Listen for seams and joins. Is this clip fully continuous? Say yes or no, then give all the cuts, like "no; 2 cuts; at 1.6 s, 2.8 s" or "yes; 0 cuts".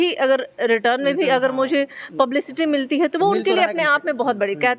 yes; 0 cuts